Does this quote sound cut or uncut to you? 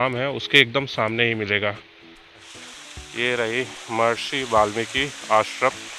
cut